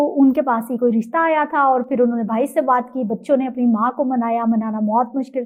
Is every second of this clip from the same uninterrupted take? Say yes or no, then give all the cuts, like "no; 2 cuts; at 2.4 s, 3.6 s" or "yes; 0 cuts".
yes; 0 cuts